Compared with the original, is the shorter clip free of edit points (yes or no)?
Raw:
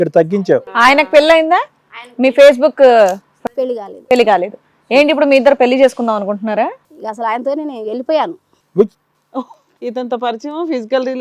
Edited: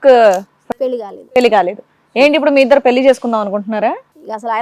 yes